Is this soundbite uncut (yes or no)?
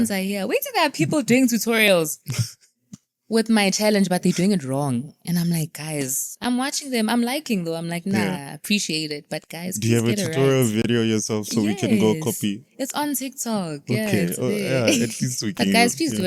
yes